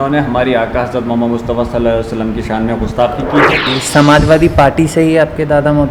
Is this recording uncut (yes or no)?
no